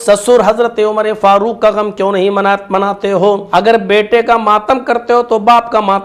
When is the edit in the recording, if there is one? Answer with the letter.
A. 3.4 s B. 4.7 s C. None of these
A